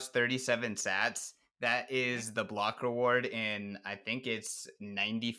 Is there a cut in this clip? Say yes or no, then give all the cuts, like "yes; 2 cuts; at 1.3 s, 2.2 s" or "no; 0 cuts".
no; 0 cuts